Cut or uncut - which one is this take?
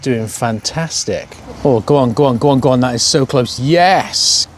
cut